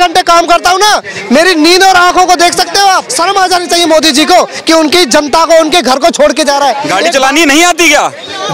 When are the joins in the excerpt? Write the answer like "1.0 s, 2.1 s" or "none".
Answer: 3.1 s, 6.8 s